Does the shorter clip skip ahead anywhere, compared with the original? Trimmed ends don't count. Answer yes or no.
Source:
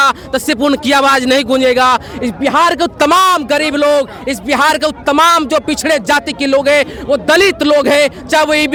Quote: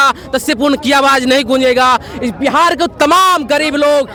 no